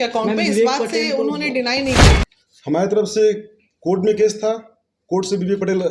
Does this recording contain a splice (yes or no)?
yes